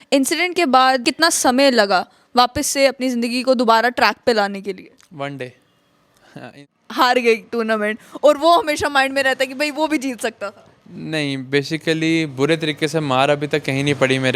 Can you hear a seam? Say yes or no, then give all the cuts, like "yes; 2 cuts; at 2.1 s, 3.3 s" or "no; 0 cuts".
yes; 2 cuts; at 1.1 s, 6.6 s